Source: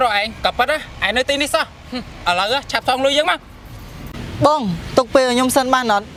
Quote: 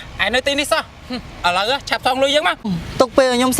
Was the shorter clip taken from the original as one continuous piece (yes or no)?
no